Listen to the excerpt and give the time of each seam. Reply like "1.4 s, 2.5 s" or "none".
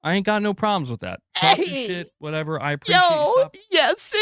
0.9 s